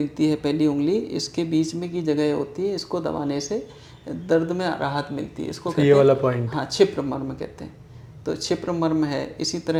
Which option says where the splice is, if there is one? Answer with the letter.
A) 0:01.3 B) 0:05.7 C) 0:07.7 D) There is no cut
D